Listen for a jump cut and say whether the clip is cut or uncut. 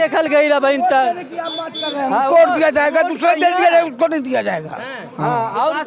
uncut